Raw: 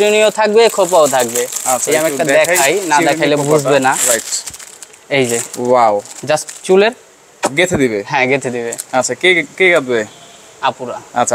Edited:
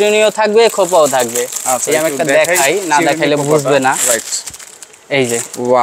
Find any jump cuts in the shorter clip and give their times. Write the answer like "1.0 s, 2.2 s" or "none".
none